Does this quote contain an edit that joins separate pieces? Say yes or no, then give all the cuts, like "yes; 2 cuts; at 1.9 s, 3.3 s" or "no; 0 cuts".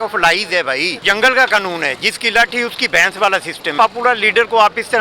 yes; 2 cuts; at 1.1 s, 3.7 s